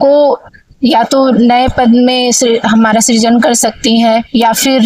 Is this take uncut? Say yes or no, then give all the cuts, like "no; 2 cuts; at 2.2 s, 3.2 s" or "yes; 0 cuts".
yes; 0 cuts